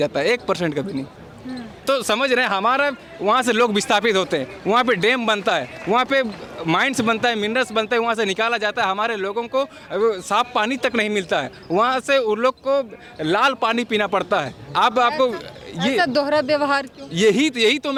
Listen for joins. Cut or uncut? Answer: uncut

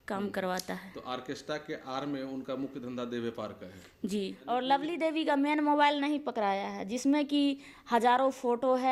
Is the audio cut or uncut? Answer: cut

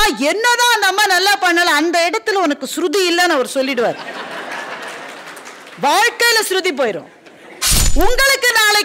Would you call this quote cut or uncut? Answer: cut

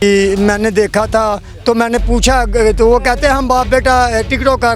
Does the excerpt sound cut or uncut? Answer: uncut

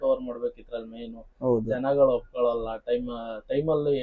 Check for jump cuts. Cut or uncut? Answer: uncut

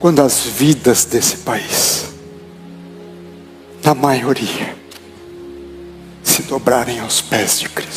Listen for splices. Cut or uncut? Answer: cut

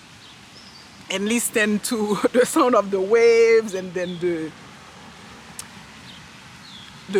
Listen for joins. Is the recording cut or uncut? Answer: uncut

